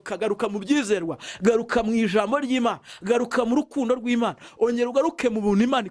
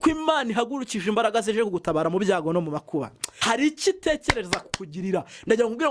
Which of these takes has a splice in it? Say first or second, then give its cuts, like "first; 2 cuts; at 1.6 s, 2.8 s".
second; 1 cut; at 3.3 s